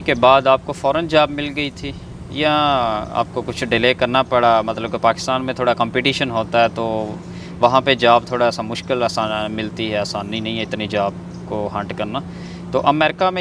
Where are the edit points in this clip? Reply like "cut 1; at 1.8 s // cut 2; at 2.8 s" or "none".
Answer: none